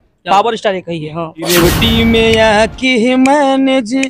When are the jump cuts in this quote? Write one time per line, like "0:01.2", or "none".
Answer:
0:01.5